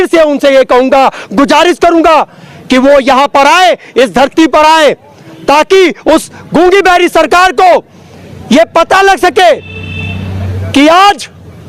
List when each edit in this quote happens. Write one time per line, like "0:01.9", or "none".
none